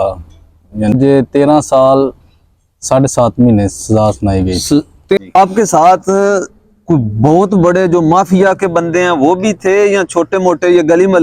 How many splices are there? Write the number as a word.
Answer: two